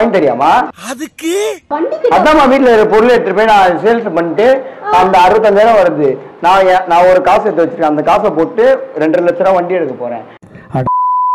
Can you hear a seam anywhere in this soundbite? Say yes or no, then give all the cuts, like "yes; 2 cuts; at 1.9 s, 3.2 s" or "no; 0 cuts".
no; 0 cuts